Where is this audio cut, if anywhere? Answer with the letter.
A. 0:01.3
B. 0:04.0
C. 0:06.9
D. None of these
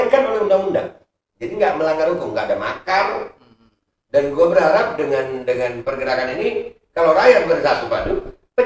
D